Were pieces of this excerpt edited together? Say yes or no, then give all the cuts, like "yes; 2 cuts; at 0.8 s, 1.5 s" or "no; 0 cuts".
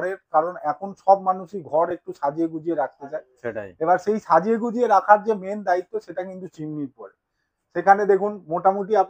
no; 0 cuts